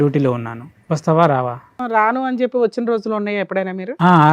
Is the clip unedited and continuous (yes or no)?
no